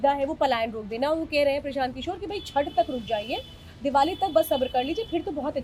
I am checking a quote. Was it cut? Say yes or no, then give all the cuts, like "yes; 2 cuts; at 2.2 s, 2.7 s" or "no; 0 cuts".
no; 0 cuts